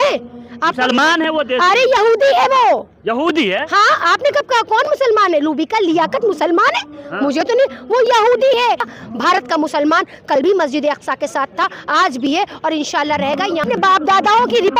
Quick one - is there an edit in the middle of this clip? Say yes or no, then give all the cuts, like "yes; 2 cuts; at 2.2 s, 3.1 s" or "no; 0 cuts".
yes; 2 cuts; at 8.9 s, 13.6 s